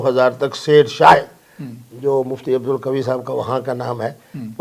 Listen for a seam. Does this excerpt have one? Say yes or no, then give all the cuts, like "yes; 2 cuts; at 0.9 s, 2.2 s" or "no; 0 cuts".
no; 0 cuts